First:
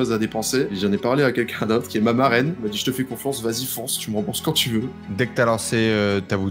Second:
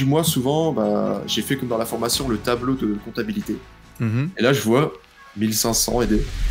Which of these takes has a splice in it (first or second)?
first